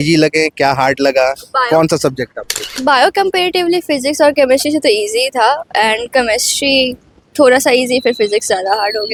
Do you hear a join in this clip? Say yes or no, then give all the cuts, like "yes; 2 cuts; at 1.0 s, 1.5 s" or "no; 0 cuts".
no; 0 cuts